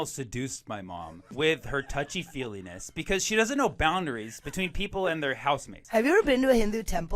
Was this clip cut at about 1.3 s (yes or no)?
yes